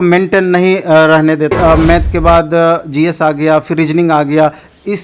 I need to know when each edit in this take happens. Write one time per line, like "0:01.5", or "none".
0:01.5